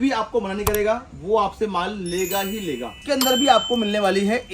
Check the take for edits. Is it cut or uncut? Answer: cut